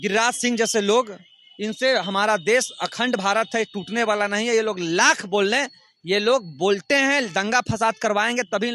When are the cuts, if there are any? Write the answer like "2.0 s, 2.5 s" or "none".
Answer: none

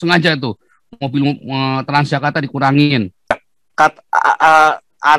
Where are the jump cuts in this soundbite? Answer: 3.4 s

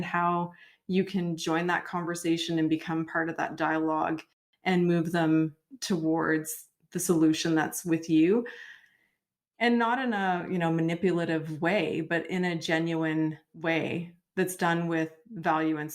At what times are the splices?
13.5 s

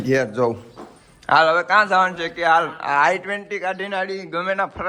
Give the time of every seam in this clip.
none

